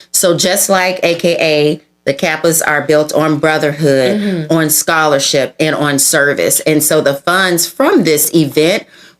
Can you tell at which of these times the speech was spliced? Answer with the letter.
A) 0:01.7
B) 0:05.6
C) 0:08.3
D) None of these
C